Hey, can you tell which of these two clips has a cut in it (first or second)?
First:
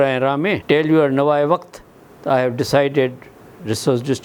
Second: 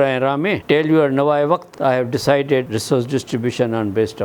second